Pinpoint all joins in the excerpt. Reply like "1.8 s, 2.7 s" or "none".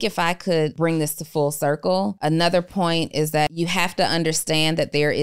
0.7 s, 2.2 s, 3.5 s